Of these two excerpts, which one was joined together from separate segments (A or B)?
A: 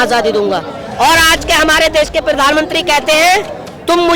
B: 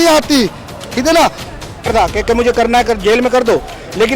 B